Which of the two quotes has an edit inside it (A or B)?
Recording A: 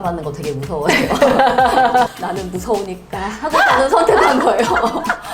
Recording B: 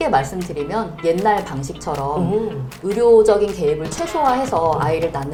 A